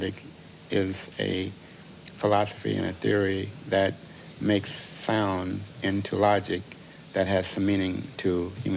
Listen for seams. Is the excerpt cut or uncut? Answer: cut